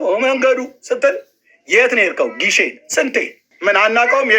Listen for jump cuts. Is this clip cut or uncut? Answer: cut